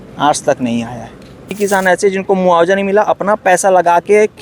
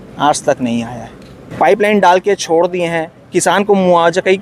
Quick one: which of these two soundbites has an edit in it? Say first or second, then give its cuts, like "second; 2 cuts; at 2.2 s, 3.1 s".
first; 1 cut; at 1.6 s